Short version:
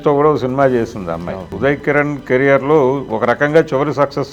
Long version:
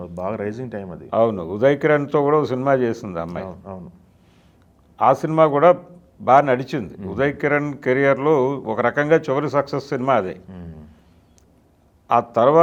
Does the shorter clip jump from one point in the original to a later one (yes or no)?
yes